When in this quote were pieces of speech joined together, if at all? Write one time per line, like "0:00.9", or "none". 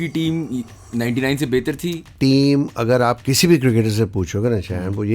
0:02.1